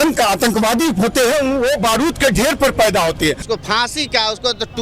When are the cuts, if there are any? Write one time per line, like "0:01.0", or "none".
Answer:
0:03.4